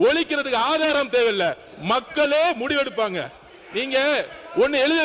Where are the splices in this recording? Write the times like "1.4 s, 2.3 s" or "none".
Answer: none